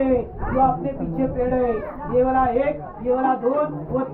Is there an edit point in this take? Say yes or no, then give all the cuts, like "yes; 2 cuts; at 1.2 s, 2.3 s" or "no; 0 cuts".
no; 0 cuts